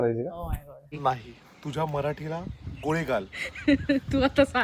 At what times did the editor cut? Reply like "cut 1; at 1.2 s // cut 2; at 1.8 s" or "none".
cut 1; at 0.9 s

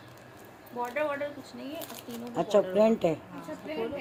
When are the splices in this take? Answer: none

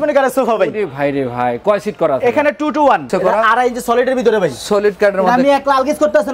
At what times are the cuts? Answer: cut 1; at 3.1 s

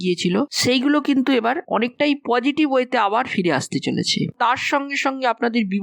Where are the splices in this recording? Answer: cut 1; at 4.3 s

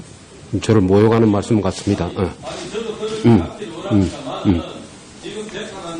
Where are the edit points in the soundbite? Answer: none

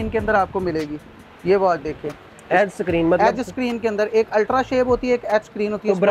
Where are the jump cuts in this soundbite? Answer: none

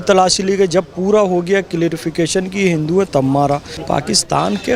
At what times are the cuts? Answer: cut 1; at 3.7 s

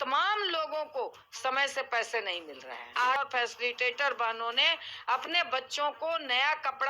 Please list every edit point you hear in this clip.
cut 1; at 3.2 s

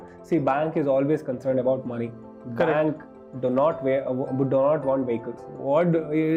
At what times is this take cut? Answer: none

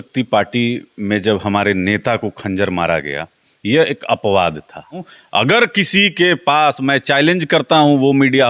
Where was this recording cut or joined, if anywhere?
cut 1; at 5.2 s

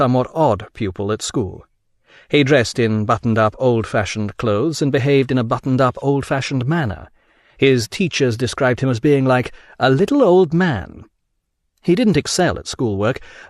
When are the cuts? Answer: cut 1; at 6.5 s

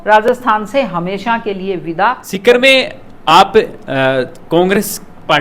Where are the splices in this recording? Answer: cut 1; at 2.3 s

